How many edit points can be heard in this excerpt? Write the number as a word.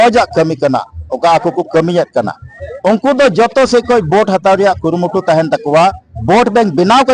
zero